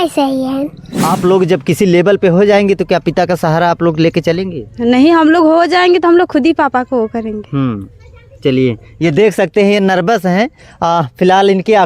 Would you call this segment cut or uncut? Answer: cut